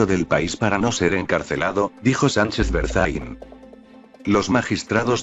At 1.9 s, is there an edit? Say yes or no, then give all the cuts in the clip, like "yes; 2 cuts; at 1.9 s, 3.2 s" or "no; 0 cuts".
no; 1 cut; at 3.7 s